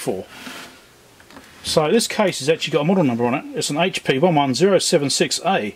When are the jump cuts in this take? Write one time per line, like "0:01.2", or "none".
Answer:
none